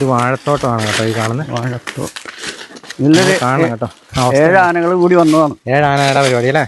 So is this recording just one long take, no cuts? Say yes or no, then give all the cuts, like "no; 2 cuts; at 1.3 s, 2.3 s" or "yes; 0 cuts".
no; 1 cut; at 2.8 s